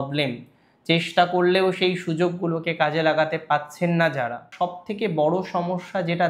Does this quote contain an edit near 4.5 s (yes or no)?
yes